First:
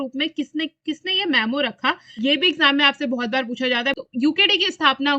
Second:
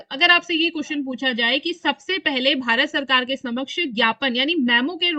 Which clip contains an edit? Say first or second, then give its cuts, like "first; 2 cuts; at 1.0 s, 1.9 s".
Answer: first; 2 cuts; at 2.1 s, 4.0 s